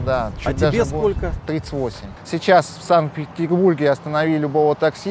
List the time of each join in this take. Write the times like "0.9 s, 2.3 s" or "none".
2.1 s

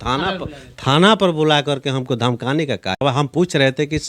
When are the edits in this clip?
3.0 s

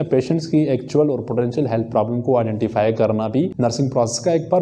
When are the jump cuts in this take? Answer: none

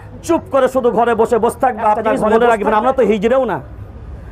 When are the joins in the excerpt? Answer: 2.2 s

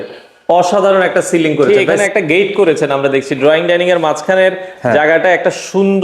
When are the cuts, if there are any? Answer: 2.0 s

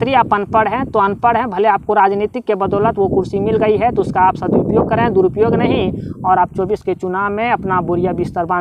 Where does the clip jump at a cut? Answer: none

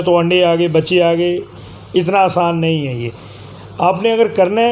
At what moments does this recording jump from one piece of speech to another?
none

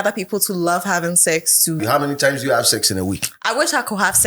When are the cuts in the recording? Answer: 1.8 s

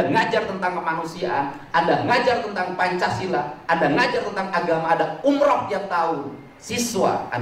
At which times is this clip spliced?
none

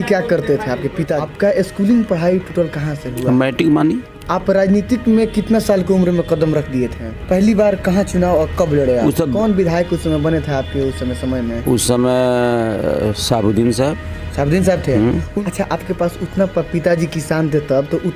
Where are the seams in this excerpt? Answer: 1.2 s, 4.1 s, 7.1 s, 9.3 s, 15.3 s

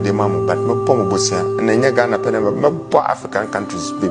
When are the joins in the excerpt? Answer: none

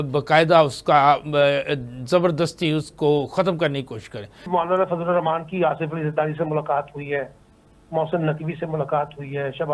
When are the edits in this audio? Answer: 4.5 s

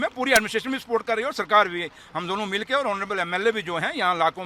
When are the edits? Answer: none

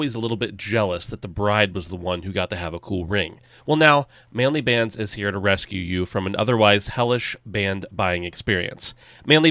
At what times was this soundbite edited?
3.5 s

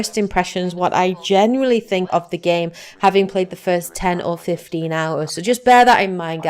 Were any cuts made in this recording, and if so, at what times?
1.2 s

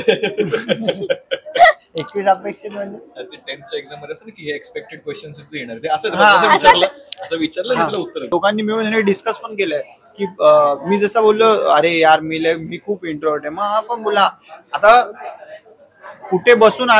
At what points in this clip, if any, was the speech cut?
8.2 s

